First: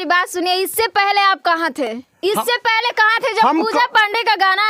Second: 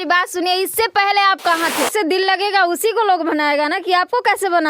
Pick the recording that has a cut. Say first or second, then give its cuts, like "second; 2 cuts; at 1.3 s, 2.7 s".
second; 1 cut; at 1.9 s